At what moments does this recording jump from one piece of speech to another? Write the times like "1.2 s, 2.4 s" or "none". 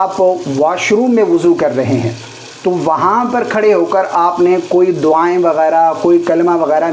none